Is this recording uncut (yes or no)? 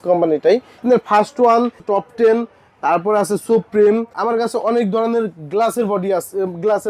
no